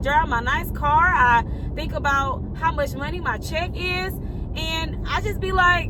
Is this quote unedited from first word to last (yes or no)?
yes